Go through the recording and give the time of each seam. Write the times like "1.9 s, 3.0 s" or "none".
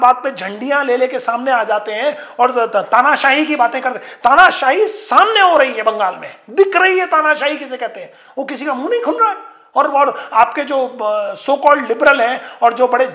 none